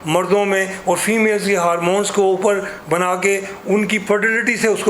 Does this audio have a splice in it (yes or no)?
no